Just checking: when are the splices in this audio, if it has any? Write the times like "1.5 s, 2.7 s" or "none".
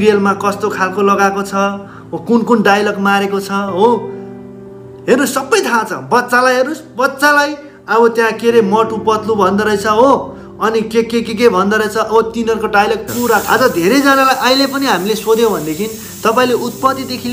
13.4 s

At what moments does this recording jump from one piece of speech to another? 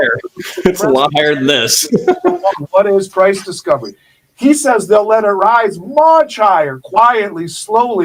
none

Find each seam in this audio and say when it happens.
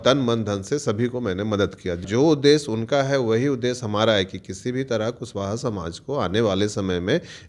2.1 s

